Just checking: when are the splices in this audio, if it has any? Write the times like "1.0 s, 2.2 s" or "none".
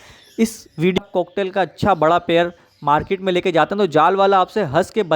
1.0 s